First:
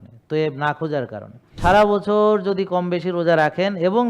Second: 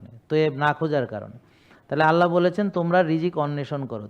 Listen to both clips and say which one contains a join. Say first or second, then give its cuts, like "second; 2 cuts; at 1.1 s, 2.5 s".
first; 1 cut; at 1.6 s